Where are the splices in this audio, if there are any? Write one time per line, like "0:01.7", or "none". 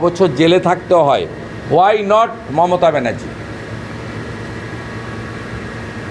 none